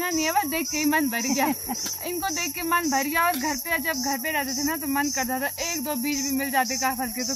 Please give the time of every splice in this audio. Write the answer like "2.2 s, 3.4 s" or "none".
none